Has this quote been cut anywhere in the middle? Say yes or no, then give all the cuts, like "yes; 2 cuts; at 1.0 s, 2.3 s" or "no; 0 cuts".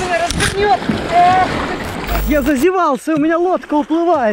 yes; 1 cut; at 2.2 s